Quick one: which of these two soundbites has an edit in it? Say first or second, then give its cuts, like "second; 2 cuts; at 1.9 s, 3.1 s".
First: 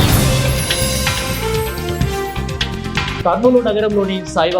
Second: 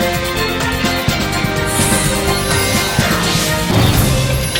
first; 1 cut; at 3.2 s